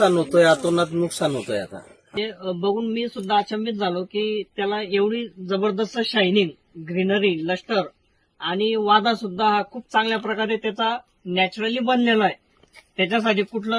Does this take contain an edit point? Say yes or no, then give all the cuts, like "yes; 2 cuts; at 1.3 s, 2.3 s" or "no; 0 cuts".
yes; 1 cut; at 2.2 s